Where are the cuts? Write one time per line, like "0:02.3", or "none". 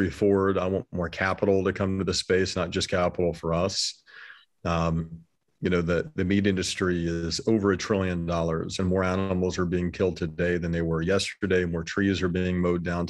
none